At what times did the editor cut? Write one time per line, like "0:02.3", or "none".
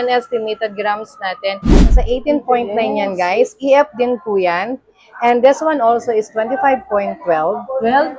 0:01.7